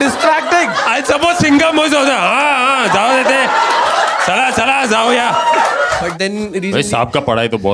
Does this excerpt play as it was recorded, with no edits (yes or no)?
no